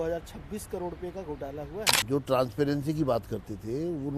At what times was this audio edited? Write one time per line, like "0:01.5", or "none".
0:01.9